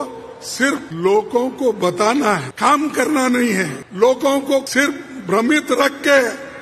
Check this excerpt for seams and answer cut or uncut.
cut